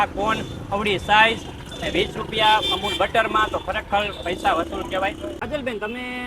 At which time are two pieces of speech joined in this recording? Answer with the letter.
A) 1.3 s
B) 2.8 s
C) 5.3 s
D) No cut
C